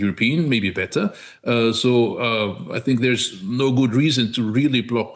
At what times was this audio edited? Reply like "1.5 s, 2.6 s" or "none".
none